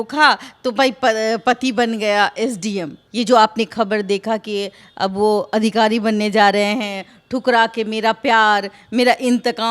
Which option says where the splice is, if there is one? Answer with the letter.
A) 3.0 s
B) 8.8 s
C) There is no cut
A